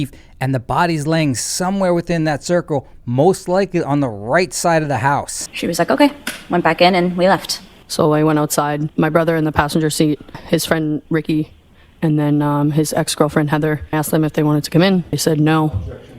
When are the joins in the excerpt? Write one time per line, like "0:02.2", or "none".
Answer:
none